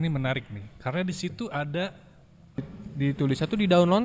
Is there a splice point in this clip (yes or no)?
yes